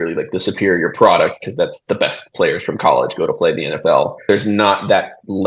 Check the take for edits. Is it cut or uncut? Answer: cut